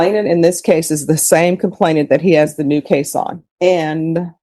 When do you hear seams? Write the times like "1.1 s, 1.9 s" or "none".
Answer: 3.4 s

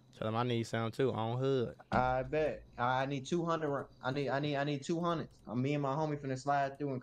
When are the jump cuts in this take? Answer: none

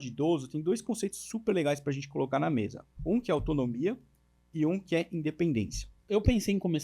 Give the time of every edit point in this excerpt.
2.9 s, 6.0 s

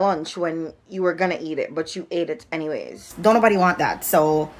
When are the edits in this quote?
3.1 s

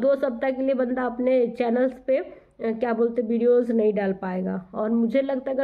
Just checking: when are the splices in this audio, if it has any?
none

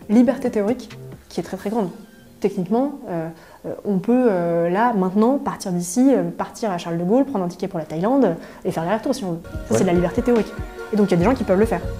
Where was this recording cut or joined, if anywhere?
none

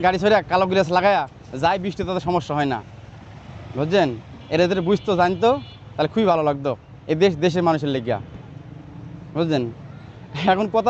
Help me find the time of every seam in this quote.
none

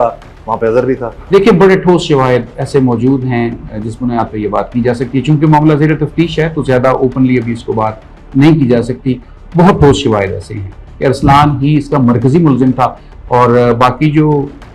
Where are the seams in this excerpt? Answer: none

